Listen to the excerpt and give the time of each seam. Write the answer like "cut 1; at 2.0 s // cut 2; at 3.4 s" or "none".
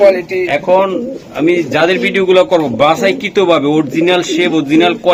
none